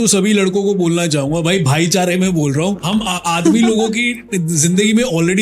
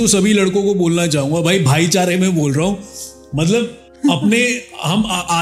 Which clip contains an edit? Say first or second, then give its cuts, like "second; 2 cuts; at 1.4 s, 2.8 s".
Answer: first; 1 cut; at 2.8 s